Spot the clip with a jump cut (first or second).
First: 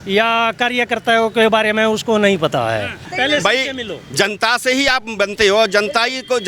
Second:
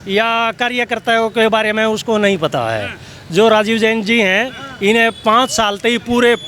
first